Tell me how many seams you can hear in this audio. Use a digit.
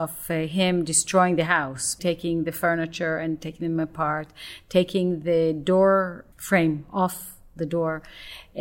2